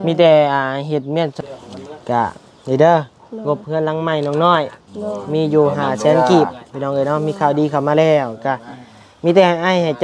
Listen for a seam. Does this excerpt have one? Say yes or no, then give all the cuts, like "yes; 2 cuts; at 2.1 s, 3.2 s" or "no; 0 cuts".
yes; 1 cut; at 1.4 s